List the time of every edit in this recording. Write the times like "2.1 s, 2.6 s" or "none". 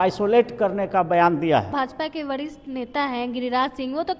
1.7 s